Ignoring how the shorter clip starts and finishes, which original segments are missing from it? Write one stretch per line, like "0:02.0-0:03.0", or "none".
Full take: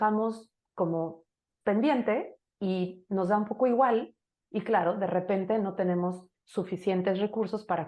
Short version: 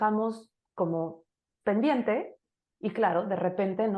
0:02.5-0:04.2